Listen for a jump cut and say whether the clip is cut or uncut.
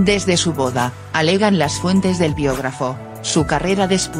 cut